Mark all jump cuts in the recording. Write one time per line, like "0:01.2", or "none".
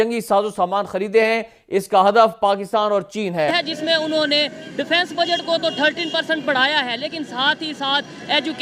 0:03.5